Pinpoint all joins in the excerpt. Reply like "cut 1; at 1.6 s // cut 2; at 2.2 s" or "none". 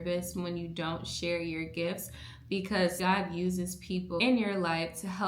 cut 1; at 3.0 s